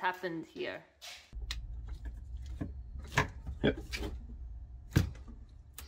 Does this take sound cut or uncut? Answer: cut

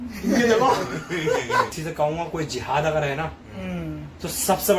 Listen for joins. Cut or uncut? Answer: cut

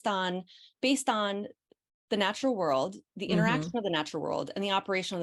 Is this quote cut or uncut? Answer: uncut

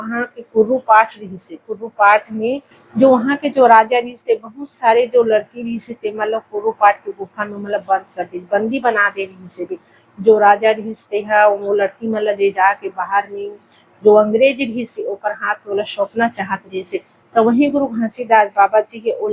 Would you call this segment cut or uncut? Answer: uncut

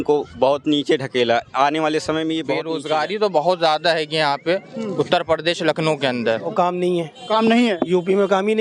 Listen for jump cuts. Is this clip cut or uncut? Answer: cut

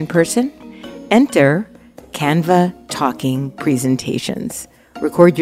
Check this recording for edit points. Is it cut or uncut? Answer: uncut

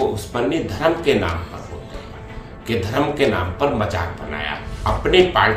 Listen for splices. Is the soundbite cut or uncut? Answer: cut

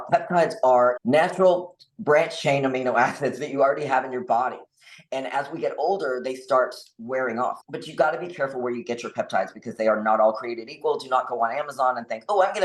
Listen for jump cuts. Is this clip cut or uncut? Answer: cut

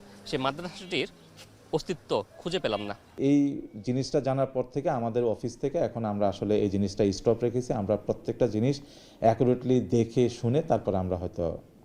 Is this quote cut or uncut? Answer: cut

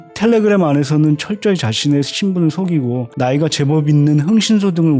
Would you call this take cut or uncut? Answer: uncut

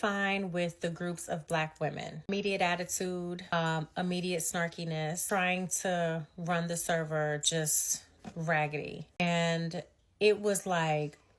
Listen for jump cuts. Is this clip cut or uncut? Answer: cut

